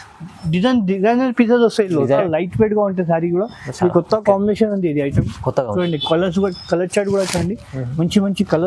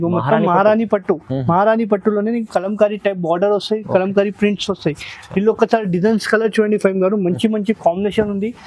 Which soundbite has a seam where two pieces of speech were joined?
first; 1 cut; at 2.2 s

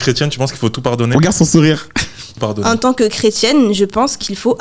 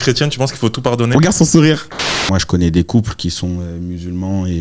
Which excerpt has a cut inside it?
second; 1 cut; at 2.2 s

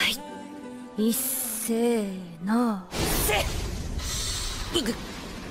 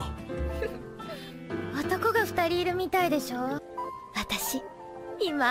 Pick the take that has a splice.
second; 1 cut; at 2.6 s

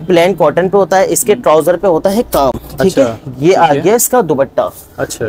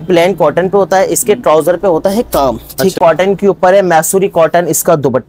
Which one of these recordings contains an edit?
second; 1 cut; at 2.9 s

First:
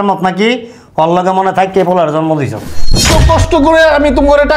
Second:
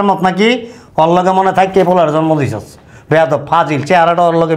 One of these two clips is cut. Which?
first; 1 cut; at 2.9 s

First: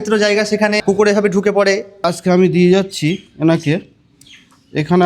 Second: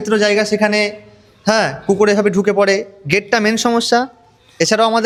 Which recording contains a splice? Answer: first; 2 cuts; at 0.8 s, 2.0 s

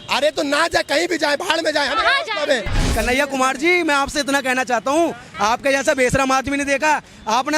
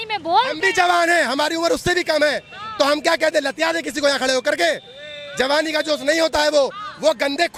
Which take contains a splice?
first; 2 cuts; at 2.8 s, 5.2 s

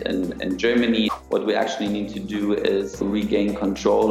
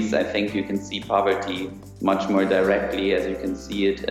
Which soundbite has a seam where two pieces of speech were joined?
first; 2 cuts; at 1.1 s, 3.0 s

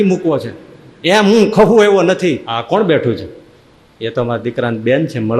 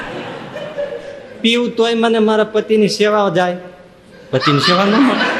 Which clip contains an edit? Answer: first; 1 cut; at 2.5 s

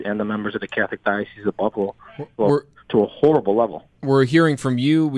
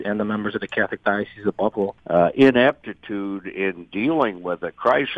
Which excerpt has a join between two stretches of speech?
second; 1 cut; at 2.0 s

